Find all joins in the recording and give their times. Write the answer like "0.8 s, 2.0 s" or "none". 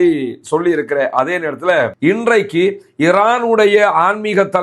1.9 s

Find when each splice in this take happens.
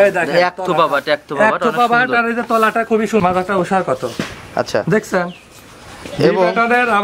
3.2 s

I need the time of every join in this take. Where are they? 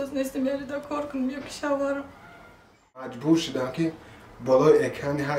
3.2 s

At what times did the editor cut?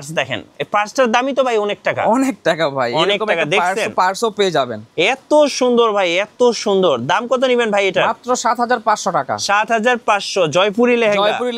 none

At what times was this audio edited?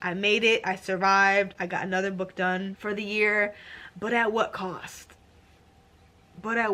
none

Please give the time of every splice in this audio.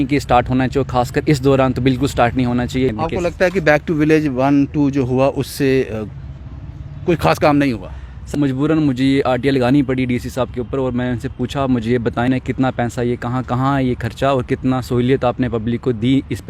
2.9 s, 8.3 s, 12.3 s

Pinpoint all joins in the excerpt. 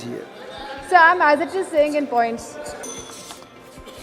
2.8 s

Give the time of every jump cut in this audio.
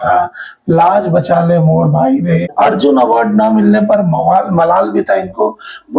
2.5 s

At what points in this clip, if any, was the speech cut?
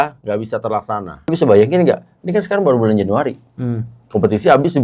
1.1 s

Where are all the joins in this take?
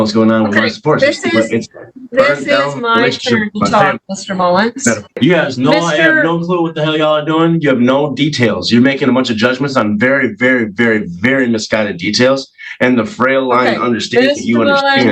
5.2 s

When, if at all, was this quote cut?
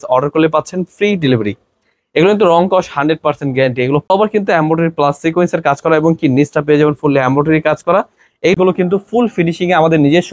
4.1 s, 8.6 s

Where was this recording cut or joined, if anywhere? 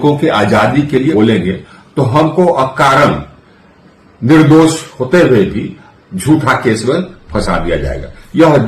1.1 s

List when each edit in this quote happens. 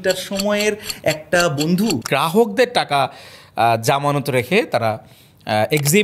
2.0 s

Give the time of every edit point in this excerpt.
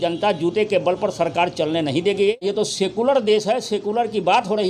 2.4 s

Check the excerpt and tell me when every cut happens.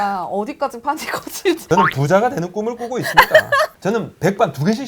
1.6 s, 3.7 s

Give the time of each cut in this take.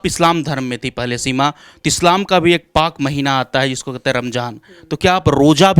none

